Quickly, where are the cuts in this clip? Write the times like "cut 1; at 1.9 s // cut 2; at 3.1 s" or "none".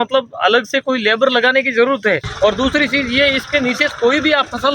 cut 1; at 2.3 s